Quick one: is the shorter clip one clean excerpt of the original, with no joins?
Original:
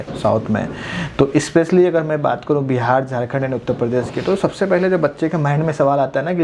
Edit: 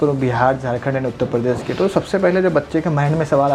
yes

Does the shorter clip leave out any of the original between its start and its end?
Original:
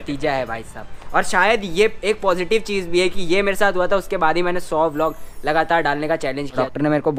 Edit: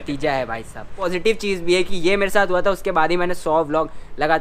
yes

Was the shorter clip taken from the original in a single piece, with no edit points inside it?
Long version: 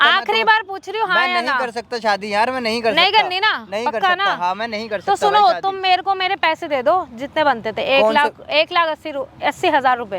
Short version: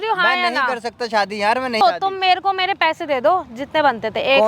no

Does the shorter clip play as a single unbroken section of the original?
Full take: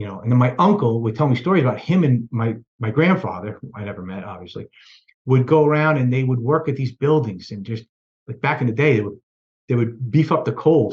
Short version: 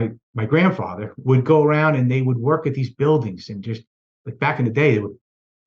no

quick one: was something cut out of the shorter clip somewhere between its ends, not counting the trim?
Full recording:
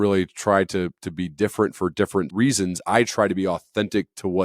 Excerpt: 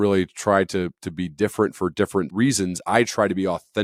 no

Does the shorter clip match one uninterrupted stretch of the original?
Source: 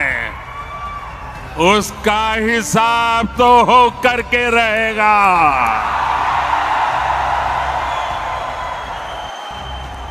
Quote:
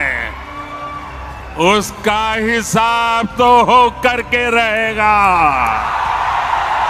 yes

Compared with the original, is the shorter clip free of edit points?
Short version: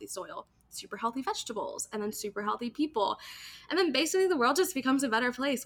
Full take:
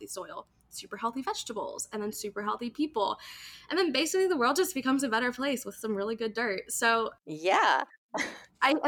yes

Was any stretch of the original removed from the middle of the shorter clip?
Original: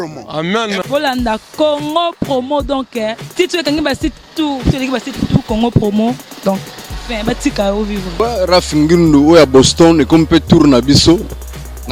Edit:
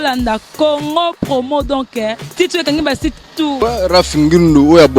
yes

